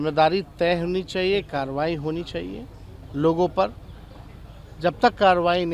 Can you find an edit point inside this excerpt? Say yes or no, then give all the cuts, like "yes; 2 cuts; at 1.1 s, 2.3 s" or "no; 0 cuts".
no; 0 cuts